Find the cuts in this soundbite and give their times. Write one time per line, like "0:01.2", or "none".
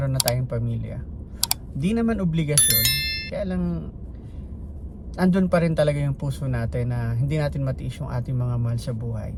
none